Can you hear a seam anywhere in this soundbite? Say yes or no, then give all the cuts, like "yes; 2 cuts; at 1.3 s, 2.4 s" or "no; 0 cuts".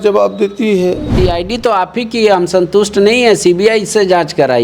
yes; 1 cut; at 1.1 s